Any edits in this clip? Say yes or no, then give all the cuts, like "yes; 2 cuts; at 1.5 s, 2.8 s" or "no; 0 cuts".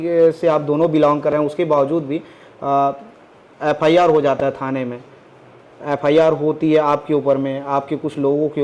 no; 0 cuts